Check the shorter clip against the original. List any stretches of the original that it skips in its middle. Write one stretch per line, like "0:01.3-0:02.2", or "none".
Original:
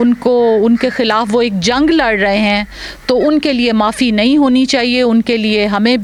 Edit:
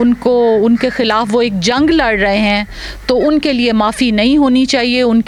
none